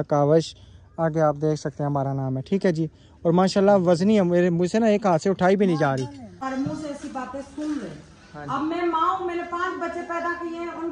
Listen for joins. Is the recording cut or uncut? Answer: cut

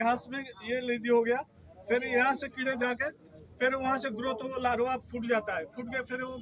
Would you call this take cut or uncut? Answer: uncut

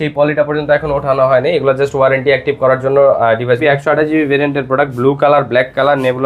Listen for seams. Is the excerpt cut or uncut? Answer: cut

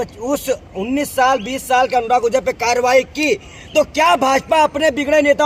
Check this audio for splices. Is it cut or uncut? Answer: uncut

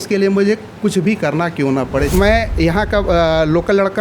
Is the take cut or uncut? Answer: cut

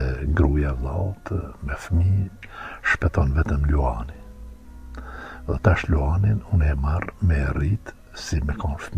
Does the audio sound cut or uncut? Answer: uncut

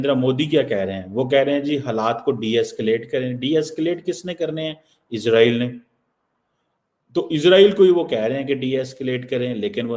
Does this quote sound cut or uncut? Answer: uncut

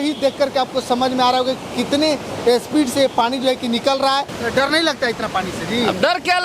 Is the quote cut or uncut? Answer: cut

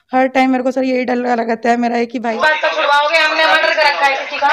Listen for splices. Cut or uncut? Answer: cut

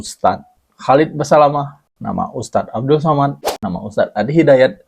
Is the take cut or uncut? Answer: cut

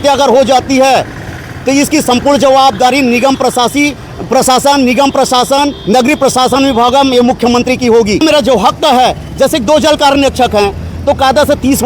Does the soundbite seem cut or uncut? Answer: uncut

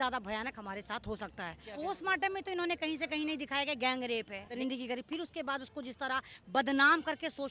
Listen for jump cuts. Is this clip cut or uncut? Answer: cut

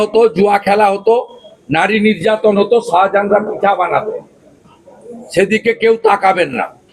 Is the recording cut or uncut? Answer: uncut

